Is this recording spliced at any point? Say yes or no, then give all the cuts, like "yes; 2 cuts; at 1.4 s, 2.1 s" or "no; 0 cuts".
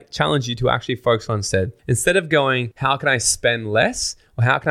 yes; 2 cuts; at 1.8 s, 2.7 s